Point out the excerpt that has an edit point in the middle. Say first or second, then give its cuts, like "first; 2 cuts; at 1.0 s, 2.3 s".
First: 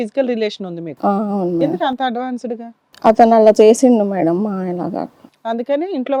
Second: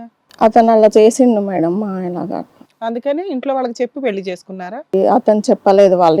second; 1 cut; at 4.9 s